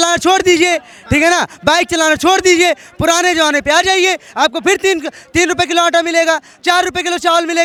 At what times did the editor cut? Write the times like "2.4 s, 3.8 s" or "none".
none

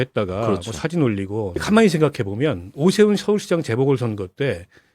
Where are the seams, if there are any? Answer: 1.6 s

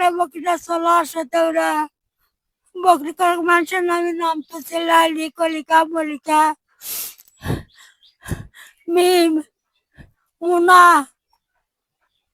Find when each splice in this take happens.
none

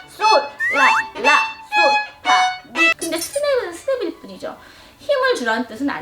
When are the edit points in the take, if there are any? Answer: 2.9 s

